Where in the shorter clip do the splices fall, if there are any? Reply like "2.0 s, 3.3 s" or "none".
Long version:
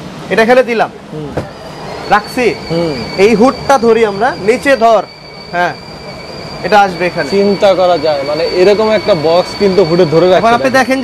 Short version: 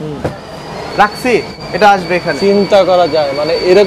1.5 s

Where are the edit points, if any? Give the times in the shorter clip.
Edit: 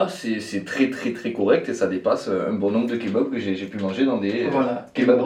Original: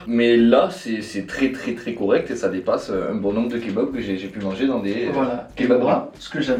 none

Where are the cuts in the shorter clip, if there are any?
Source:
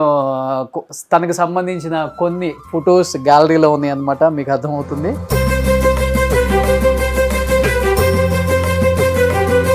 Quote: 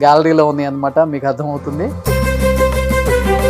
none

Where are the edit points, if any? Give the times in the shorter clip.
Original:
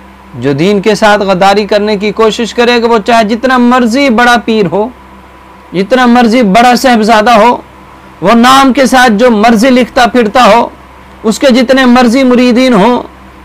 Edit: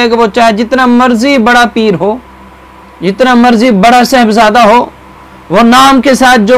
none

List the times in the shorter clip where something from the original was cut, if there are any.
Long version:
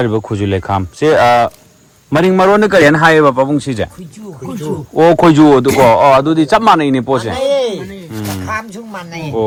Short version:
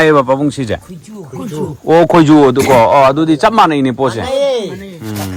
none

